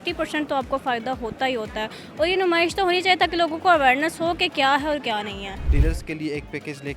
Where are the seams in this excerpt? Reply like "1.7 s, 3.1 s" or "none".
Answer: 5.7 s